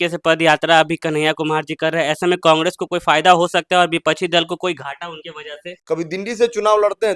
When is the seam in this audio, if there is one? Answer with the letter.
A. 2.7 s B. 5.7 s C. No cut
B